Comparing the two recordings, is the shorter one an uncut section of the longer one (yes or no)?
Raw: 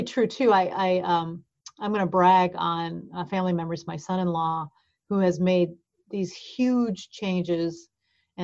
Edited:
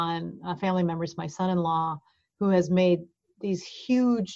yes